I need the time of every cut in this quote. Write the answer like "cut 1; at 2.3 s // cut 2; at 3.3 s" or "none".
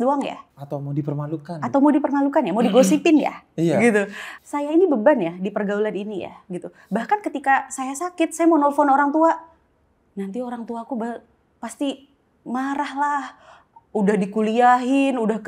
none